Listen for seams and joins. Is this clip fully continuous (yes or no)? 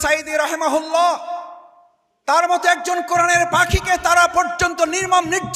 yes